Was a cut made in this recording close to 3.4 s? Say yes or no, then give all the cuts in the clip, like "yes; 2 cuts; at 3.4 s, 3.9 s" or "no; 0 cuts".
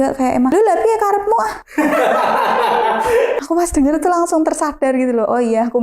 yes; 1 cut; at 3.4 s